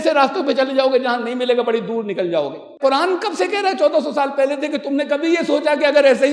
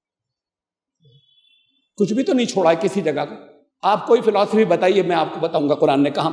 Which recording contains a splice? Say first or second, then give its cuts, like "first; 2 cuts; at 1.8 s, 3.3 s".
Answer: first; 1 cut; at 2.8 s